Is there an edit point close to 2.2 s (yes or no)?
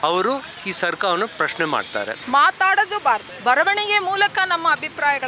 yes